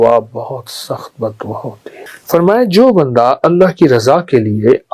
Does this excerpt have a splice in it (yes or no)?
yes